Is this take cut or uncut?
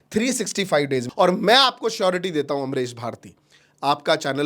cut